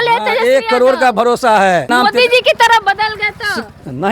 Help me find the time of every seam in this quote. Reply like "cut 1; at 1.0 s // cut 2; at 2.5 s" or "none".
cut 1; at 1.9 s